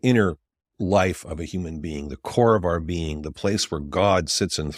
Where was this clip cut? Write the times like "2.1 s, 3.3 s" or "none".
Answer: none